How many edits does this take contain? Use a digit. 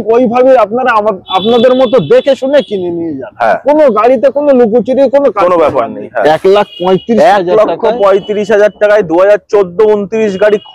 1